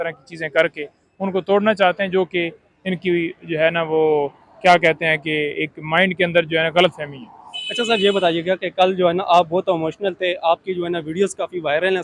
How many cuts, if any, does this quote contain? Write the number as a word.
zero